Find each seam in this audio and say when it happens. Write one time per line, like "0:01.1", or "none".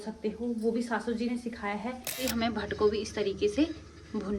0:02.3